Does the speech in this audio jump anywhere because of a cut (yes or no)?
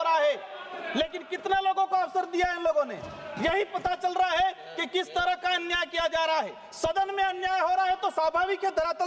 no